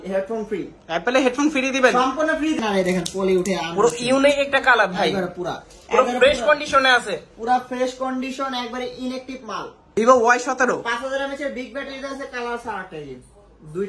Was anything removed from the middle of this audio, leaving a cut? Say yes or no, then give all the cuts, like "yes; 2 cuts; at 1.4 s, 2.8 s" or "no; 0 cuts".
yes; 2 cuts; at 2.6 s, 9.8 s